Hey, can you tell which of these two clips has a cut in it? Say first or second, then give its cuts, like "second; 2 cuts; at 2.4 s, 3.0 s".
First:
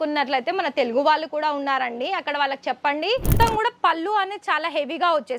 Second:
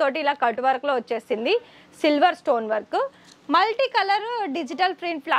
first; 1 cut; at 3.3 s